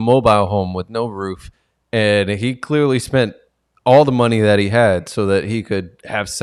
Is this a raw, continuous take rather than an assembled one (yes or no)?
yes